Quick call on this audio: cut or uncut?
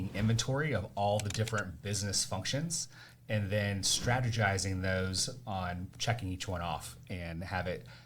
cut